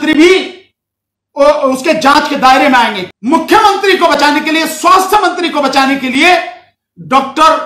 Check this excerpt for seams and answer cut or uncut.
cut